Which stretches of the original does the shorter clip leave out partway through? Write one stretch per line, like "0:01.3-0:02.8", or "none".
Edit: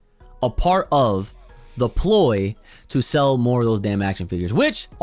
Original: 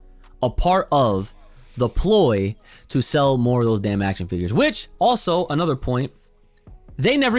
none